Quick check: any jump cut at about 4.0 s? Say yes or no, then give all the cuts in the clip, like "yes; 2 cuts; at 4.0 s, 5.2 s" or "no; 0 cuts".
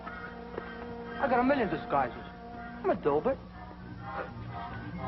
yes; 1 cut; at 4.0 s